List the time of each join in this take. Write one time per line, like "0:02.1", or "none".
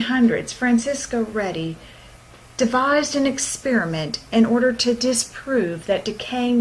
none